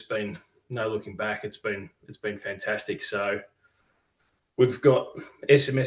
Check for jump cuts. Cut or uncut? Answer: uncut